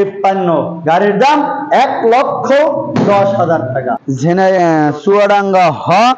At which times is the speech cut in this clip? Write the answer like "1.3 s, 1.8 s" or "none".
4.0 s